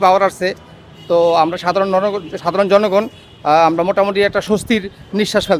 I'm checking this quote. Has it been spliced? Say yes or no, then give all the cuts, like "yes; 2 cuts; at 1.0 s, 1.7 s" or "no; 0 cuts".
no; 0 cuts